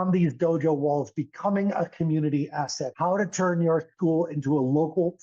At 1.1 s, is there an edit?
no; 1 cut; at 2.8 s

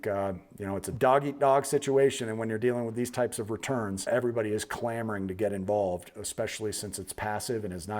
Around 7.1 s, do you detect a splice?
no; 2 cuts; at 0.9 s, 4.1 s

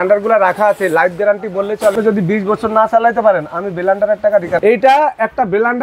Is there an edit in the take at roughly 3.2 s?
no; 2 cuts; at 1.9 s, 4.6 s

